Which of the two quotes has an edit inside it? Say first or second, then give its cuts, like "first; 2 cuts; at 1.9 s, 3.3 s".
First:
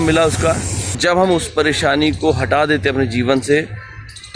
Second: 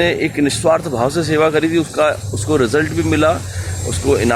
first; 1 cut; at 1.0 s